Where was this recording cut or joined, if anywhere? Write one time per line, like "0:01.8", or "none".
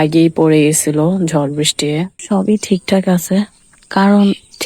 0:02.2